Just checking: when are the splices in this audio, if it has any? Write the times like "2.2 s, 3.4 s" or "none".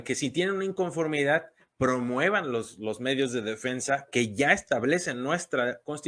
none